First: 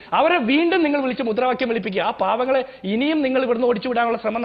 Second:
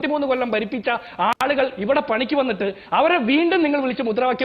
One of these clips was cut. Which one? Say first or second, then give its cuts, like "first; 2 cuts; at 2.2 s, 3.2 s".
second; 1 cut; at 1.4 s